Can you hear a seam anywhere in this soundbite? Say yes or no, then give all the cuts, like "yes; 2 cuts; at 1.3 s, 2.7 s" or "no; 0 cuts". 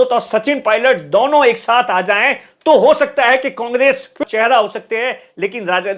yes; 1 cut; at 4.2 s